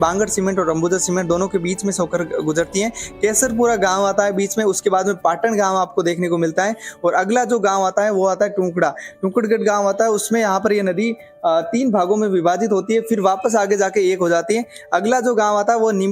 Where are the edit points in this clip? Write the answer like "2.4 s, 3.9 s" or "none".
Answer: none